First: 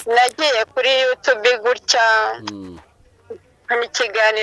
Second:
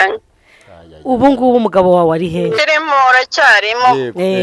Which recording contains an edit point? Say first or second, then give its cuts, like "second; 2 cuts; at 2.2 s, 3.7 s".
second; 1 cut; at 2.6 s